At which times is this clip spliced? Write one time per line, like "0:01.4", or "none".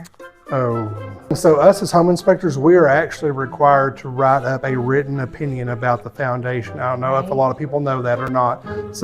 0:01.3